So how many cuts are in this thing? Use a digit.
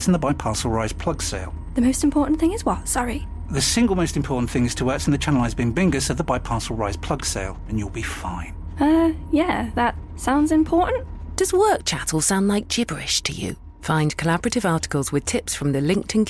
0